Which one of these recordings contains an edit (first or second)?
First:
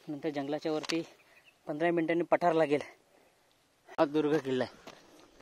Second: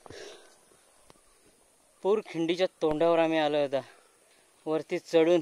first